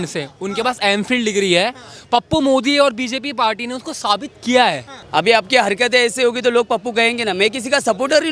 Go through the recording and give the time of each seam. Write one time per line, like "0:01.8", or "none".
0:04.9